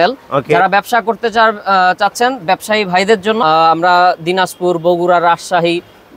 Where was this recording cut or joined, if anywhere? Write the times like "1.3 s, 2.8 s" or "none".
3.4 s